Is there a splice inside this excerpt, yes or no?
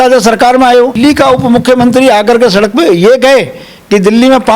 yes